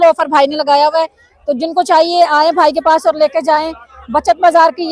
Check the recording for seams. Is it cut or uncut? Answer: uncut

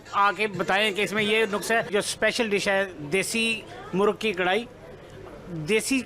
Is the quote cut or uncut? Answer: cut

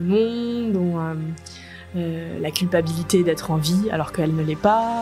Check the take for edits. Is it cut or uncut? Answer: uncut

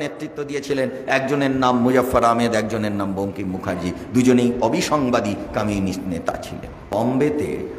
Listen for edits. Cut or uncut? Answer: cut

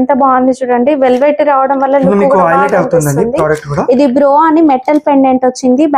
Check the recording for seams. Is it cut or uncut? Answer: uncut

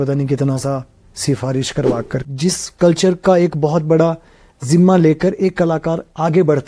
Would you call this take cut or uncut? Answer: cut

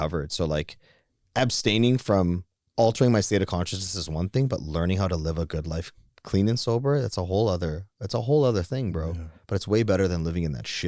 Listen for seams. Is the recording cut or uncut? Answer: uncut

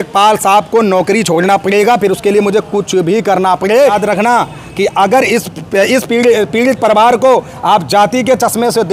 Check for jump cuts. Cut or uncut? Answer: cut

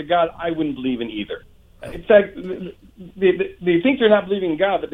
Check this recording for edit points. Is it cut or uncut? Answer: uncut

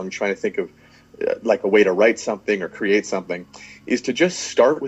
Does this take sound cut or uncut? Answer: uncut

